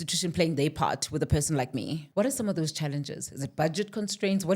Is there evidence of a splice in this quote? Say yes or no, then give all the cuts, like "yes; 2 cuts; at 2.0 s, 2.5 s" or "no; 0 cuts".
yes; 1 cut; at 2.0 s